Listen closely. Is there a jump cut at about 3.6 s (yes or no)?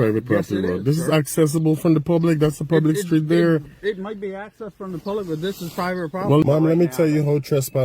no